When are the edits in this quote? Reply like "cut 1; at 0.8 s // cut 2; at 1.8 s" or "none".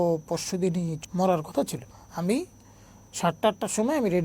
cut 1; at 1.0 s // cut 2; at 1.8 s